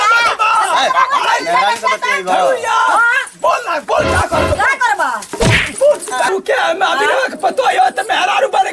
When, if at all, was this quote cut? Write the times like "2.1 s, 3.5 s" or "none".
6.3 s